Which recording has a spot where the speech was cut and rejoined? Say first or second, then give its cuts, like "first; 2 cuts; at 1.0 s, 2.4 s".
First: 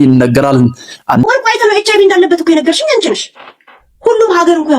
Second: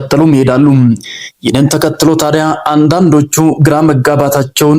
first; 1 cut; at 1.2 s